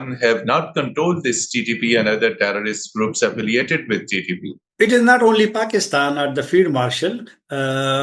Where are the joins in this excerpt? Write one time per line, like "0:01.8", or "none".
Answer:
none